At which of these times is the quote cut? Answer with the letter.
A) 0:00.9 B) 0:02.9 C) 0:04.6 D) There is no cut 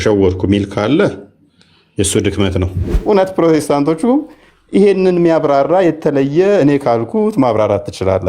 B